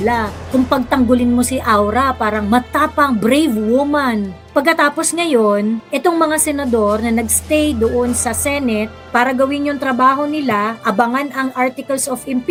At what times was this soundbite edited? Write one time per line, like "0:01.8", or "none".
none

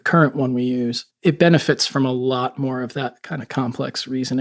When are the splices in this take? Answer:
0:01.2

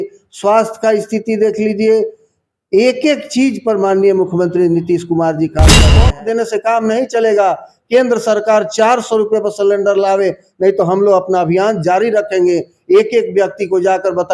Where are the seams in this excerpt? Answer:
0:05.9

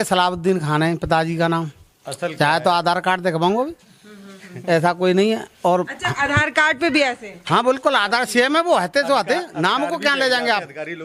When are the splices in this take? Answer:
none

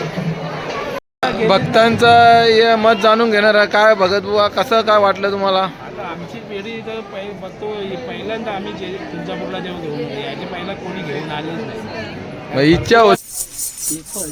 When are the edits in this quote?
0:01.0
0:13.2

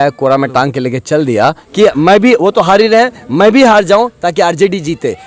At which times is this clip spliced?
0:01.6

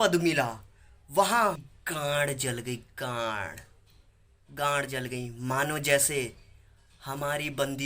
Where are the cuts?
0:01.6

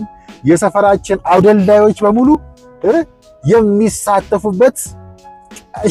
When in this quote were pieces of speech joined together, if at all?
none

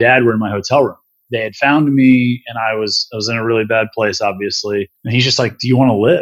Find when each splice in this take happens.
0:01.2
0:05.0

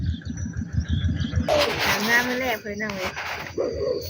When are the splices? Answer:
0:01.5

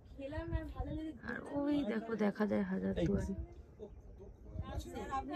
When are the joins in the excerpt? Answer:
none

